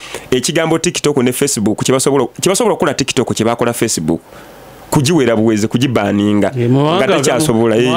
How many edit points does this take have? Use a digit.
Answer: 0